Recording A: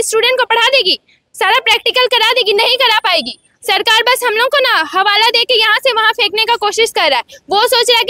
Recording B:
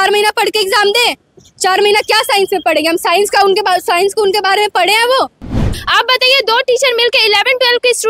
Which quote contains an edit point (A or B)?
B